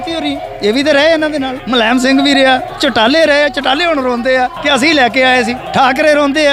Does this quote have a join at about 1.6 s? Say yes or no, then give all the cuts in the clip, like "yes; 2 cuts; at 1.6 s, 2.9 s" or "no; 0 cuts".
yes; 4 cuts; at 1.6 s, 2.7 s, 4.6 s, 5.6 s